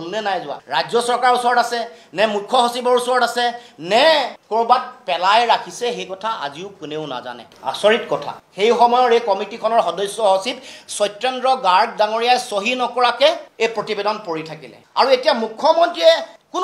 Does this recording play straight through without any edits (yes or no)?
yes